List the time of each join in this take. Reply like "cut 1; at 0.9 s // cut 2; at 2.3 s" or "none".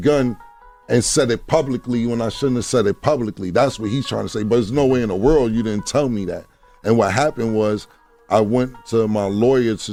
none